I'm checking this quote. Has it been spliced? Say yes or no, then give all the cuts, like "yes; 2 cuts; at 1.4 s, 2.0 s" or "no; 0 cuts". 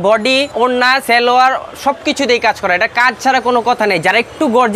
yes; 1 cut; at 1.0 s